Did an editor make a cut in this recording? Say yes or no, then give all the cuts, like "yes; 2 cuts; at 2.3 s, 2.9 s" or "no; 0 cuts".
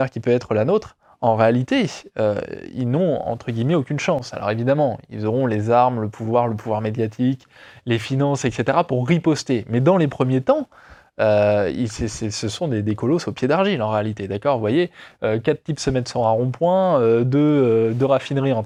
no; 0 cuts